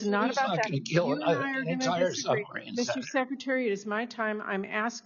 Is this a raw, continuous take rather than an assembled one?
yes; 0 cuts

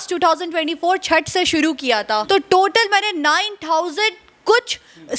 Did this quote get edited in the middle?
yes; 1 cut; at 2.0 s

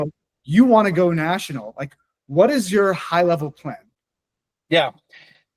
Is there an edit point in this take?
no; 0 cuts

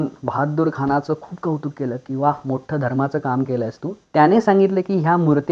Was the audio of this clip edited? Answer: yes; 1 cut; at 3.9 s

